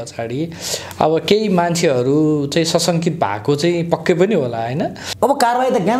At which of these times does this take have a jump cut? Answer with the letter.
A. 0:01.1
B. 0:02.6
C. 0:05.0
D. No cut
C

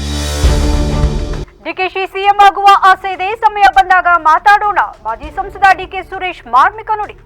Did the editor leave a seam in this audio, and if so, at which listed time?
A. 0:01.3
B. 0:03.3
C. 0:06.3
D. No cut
A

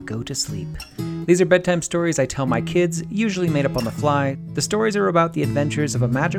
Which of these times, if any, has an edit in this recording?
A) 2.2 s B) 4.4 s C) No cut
B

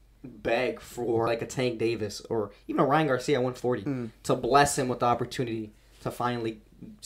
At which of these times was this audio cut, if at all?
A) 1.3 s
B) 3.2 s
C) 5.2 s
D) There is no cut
A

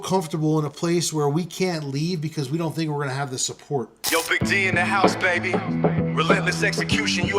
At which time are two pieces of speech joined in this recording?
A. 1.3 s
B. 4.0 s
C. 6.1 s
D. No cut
B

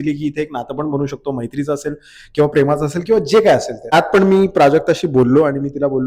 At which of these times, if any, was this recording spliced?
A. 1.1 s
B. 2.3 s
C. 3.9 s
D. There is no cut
C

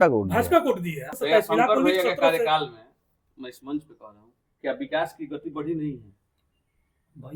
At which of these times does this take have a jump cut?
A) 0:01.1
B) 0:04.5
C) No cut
A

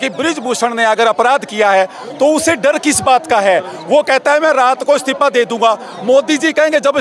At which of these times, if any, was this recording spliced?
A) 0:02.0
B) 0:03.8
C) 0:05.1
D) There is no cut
D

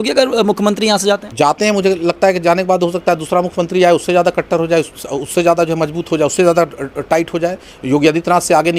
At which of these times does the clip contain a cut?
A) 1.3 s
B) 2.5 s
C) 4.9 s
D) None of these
A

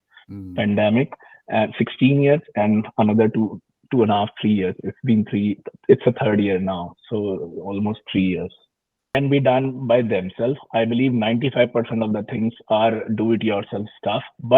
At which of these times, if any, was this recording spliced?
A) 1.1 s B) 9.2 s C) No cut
B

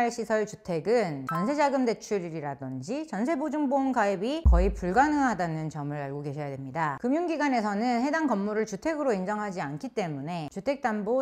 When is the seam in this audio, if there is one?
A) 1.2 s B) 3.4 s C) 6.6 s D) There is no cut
A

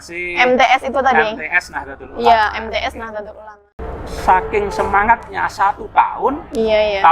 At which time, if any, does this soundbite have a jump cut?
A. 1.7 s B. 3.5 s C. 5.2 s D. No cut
B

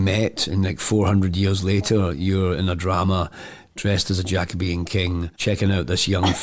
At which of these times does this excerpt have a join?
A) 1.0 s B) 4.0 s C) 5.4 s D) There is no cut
D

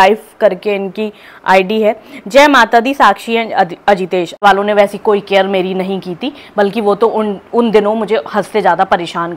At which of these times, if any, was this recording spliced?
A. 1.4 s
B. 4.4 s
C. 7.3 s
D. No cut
B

